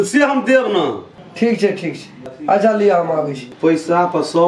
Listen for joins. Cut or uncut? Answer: cut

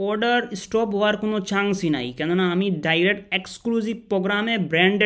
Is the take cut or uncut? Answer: uncut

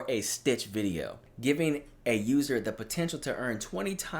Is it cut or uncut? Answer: cut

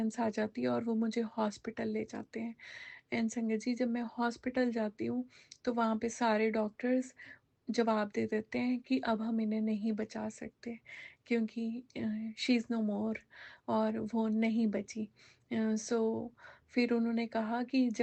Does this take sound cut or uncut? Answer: uncut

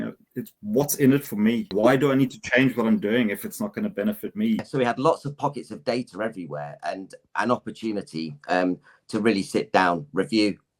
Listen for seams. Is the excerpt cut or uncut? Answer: cut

